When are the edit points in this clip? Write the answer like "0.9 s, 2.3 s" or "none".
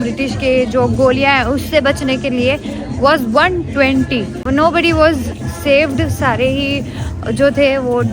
4.4 s